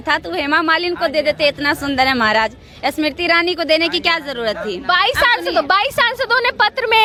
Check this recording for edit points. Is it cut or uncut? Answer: uncut